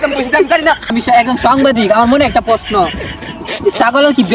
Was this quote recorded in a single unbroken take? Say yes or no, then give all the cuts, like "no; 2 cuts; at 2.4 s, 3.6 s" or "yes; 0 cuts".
no; 1 cut; at 0.9 s